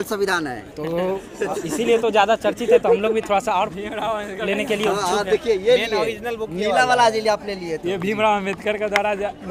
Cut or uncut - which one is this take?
uncut